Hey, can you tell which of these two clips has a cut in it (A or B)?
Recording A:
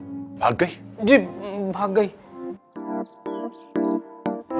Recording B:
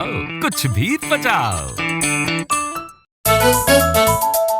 B